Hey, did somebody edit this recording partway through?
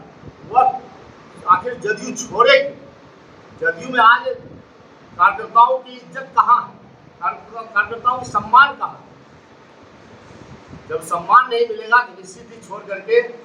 no; 0 cuts

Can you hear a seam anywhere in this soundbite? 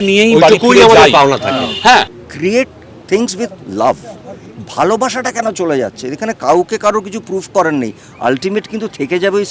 yes; 1 cut; at 2.2 s

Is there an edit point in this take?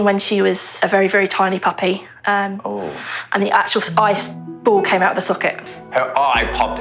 yes; 1 cut; at 5.7 s

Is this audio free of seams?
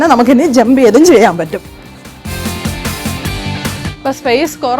no; 2 cuts; at 2.2 s, 3.9 s

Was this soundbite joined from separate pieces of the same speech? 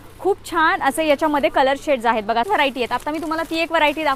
yes; 1 cut; at 2.4 s

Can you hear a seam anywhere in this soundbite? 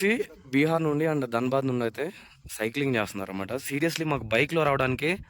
no; 0 cuts

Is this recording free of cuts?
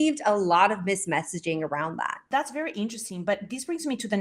no; 1 cut; at 2.2 s

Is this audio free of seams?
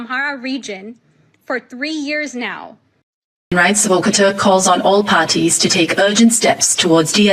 no; 1 cut; at 3.5 s

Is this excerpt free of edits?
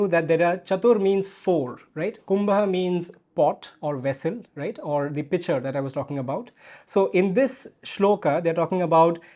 yes; 0 cuts

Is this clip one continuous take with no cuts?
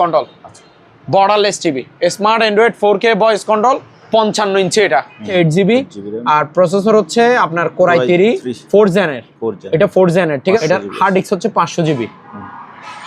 no; 2 cuts; at 5.3 s, 10.6 s

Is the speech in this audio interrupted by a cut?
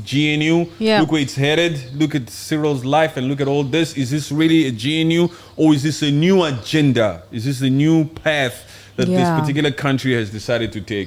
no; 0 cuts

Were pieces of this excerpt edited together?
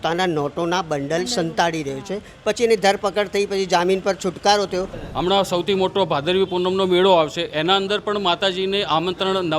yes; 1 cut; at 5.0 s

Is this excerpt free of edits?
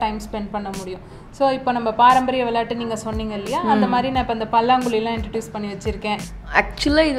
no; 1 cut; at 6.2 s

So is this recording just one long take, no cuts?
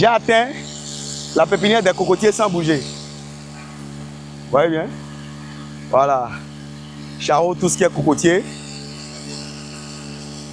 yes; 0 cuts

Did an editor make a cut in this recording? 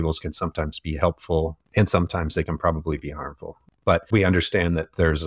yes; 2 cuts; at 1.6 s, 4.1 s

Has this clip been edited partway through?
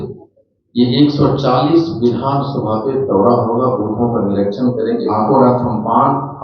yes; 1 cut; at 5.1 s

